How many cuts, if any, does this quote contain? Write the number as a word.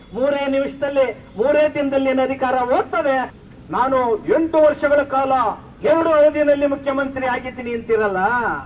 one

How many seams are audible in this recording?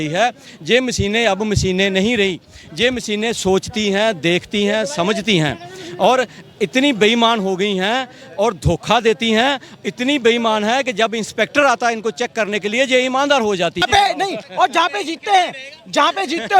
one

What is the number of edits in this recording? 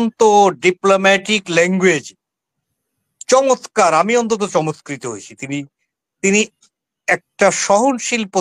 zero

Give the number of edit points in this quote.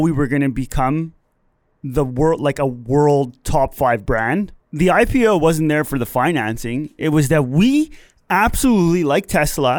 one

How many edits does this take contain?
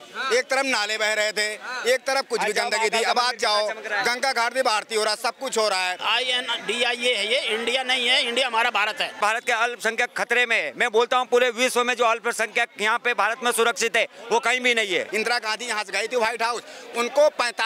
three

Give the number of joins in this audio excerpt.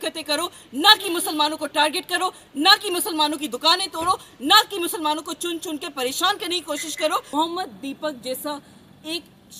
one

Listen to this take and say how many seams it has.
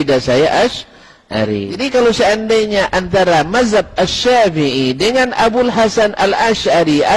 one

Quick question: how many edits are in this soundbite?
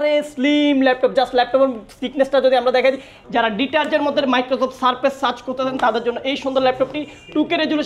one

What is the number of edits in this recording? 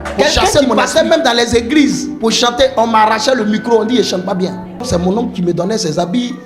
one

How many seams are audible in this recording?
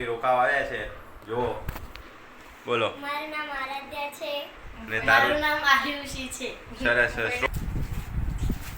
one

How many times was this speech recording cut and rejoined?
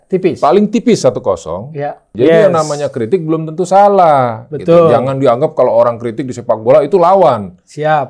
one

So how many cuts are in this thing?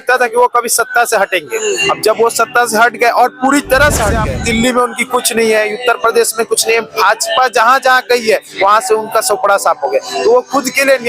one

